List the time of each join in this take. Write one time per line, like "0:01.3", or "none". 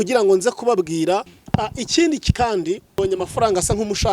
0:01.3
0:03.0